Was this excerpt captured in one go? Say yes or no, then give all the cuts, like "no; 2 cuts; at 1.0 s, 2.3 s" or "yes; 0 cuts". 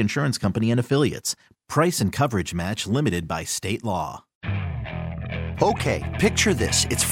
no; 1 cut; at 4.4 s